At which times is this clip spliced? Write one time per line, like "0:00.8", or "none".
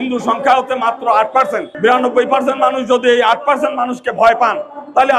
0:01.7